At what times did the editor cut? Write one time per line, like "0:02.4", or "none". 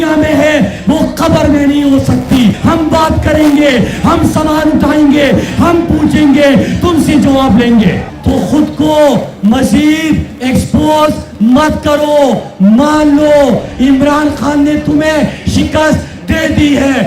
0:02.6
0:08.1

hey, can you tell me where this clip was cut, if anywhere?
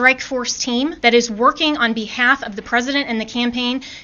0:01.0

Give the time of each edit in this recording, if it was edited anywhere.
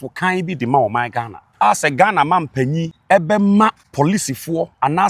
0:01.4
0:02.9
0:03.8

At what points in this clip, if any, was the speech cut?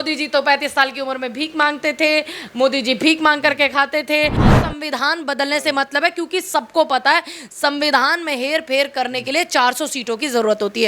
0:04.4

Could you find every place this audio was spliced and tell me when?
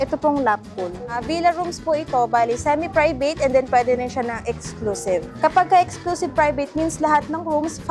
0:01.2
0:05.3

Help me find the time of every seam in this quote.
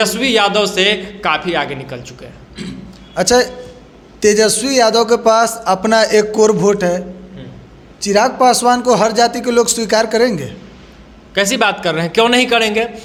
none

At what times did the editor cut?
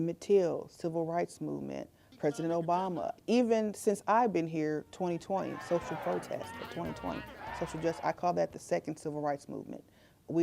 0:02.0
0:03.2

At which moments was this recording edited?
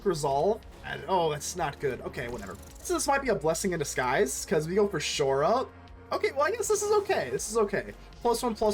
0:00.9
0:02.8

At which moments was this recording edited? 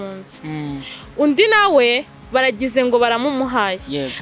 none

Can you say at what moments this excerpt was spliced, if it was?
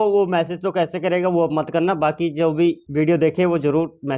0:02.8

